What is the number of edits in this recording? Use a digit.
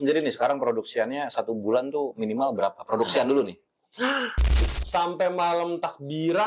1